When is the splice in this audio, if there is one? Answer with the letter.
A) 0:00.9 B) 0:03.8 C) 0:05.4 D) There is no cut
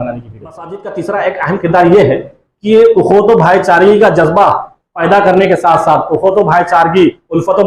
A